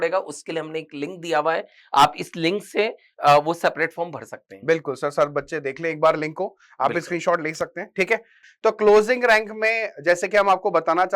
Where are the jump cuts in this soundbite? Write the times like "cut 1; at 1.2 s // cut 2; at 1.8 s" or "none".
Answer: cut 1; at 8.4 s